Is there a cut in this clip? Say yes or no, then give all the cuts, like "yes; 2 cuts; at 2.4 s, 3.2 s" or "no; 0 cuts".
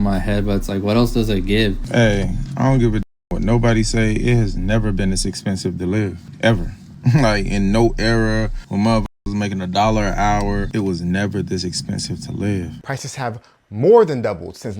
yes; 2 cuts; at 1.8 s, 12.8 s